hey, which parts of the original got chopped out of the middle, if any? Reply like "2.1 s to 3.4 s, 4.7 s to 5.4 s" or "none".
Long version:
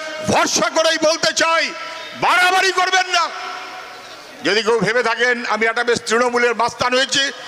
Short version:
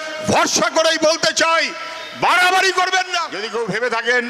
3.4 s to 4.5 s